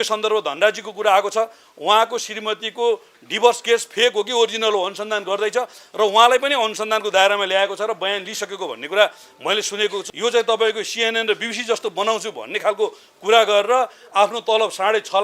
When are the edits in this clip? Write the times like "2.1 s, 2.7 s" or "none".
10.1 s

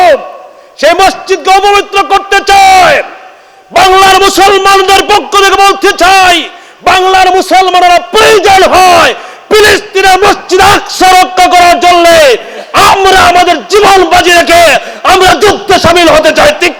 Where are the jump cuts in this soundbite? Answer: none

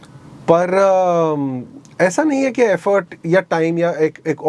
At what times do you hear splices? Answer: none

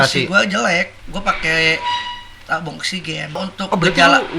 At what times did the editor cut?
3.4 s

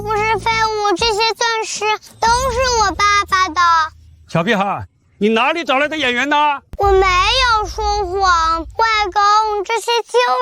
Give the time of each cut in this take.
6.7 s

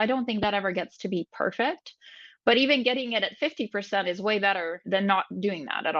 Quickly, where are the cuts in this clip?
4.8 s

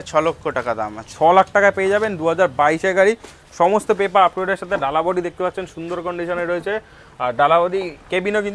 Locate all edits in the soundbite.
none

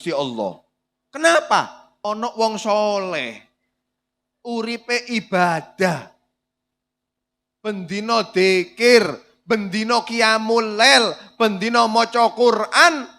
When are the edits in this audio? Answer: 1.8 s

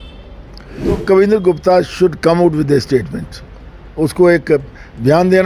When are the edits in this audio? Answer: 1.0 s

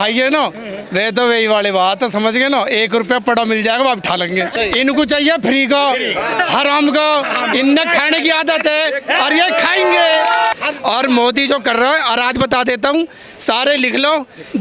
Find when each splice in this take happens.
4.5 s, 10.5 s

